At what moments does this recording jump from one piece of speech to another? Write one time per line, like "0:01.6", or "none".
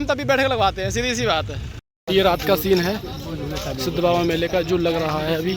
0:01.9